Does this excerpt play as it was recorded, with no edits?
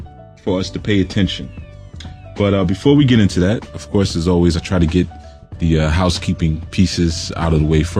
no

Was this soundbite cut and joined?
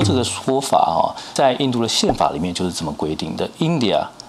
no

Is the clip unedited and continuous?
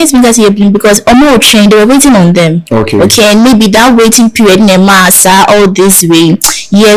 yes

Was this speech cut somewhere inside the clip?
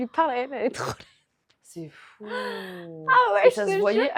no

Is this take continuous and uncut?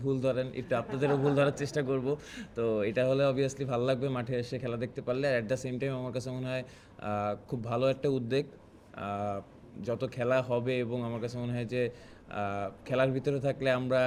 yes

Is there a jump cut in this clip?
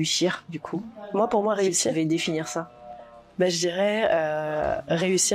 no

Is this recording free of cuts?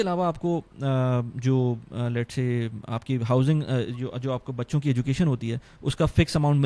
yes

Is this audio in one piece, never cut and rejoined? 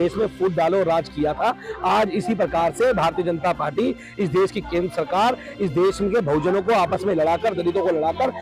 yes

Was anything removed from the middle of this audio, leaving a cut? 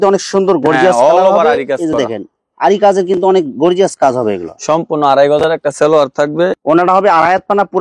no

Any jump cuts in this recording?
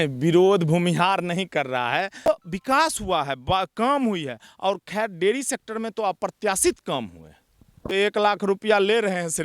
yes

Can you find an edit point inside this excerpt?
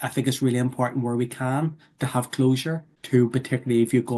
yes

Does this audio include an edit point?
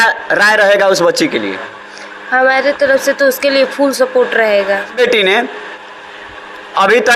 yes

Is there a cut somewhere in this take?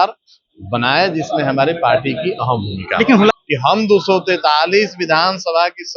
yes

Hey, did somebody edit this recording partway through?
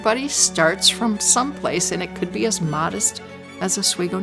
no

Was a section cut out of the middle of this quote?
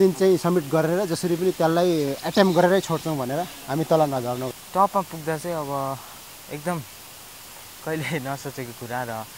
yes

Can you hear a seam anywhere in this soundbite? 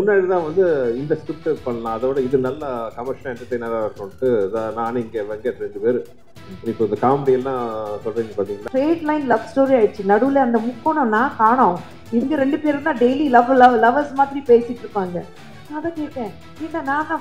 yes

